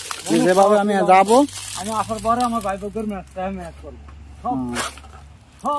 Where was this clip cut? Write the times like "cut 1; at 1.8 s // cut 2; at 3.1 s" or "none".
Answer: none